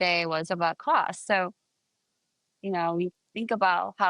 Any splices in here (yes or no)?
no